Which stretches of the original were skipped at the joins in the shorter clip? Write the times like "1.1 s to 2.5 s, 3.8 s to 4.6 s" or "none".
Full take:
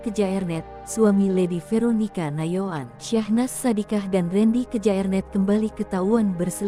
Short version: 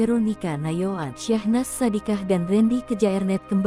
2.8 s to 2.9 s